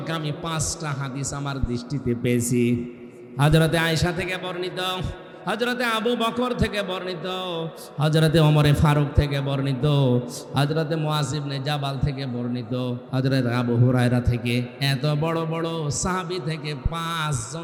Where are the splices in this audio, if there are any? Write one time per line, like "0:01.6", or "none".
none